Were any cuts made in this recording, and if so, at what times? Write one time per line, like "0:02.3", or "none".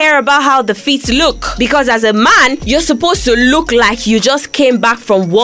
0:01.5
0:02.6